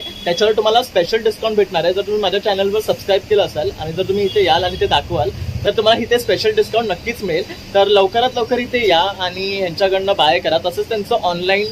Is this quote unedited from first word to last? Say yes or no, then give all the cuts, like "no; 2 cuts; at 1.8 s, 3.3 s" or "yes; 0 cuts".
yes; 0 cuts